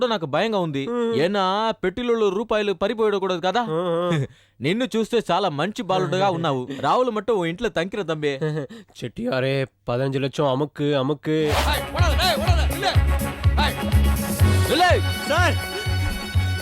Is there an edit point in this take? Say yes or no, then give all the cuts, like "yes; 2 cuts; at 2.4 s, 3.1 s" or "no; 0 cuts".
yes; 1 cut; at 11.6 s